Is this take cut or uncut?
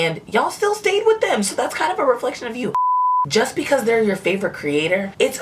cut